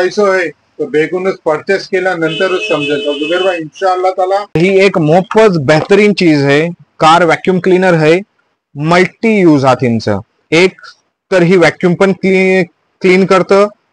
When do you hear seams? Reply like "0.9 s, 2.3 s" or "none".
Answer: 4.6 s